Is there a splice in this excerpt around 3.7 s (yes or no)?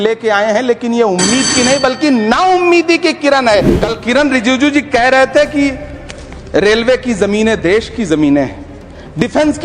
yes